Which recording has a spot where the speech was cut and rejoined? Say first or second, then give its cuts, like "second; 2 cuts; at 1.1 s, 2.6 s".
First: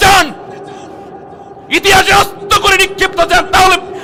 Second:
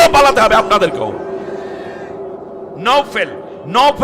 second; 1 cut; at 2.8 s